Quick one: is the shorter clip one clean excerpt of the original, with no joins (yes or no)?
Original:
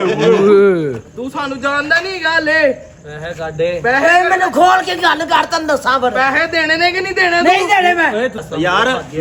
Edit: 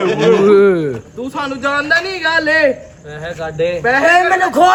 yes